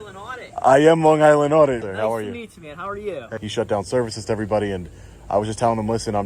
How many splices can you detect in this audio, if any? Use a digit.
2